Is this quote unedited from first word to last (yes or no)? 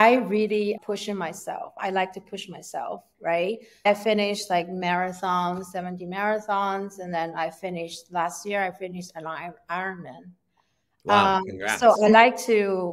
no